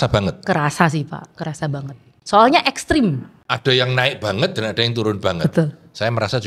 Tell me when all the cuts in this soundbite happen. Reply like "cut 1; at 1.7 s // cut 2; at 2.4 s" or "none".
cut 1; at 3.3 s